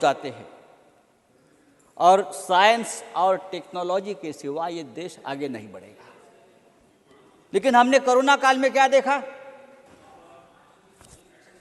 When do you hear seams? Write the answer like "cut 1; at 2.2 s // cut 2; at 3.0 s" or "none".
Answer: none